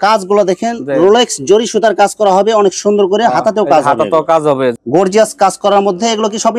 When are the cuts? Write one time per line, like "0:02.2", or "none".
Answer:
0:04.8